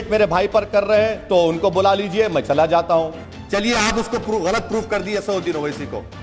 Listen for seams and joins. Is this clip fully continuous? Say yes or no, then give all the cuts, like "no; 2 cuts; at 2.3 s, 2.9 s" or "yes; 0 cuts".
no; 1 cut; at 3.2 s